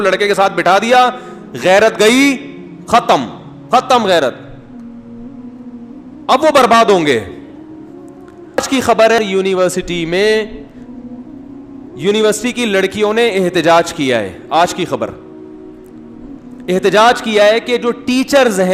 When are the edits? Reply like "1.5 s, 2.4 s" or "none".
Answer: none